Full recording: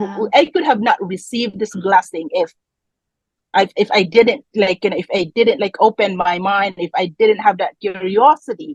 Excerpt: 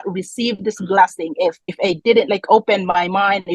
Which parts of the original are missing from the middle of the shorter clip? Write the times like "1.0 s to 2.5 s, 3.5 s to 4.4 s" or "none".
2.7 s to 5.0 s